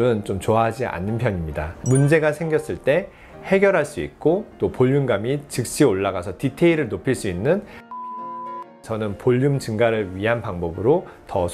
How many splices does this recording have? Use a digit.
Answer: 0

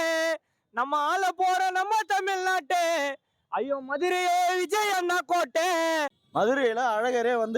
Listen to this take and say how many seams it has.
1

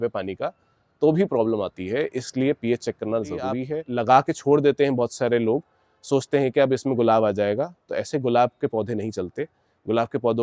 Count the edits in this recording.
1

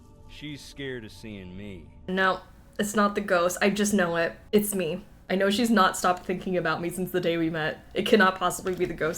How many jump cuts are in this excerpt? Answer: 3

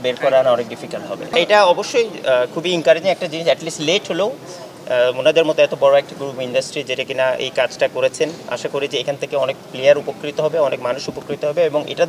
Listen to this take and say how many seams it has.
1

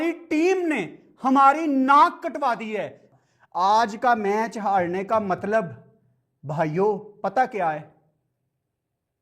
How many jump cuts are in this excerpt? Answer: 1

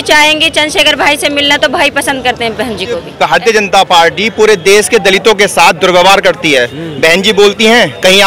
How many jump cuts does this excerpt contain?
1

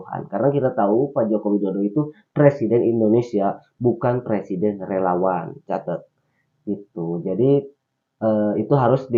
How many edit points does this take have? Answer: 0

